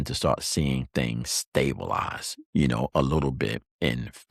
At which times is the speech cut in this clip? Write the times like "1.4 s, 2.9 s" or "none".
none